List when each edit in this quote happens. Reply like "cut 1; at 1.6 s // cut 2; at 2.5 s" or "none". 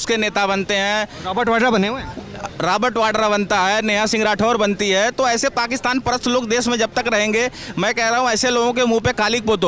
none